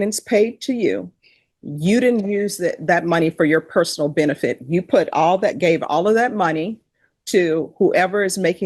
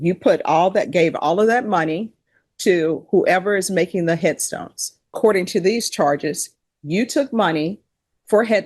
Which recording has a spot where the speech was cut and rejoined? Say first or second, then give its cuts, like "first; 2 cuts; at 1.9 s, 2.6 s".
second; 1 cut; at 5.1 s